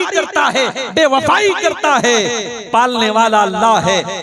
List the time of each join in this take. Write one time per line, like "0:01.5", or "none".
none